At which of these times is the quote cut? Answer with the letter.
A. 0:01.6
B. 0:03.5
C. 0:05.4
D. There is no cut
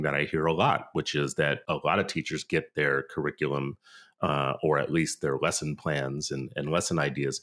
A